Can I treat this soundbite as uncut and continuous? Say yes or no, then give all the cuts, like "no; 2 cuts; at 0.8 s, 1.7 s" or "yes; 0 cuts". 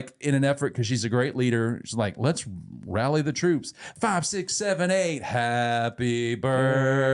no; 1 cut; at 3.9 s